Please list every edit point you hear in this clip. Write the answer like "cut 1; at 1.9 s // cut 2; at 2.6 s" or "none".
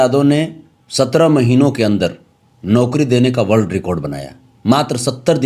none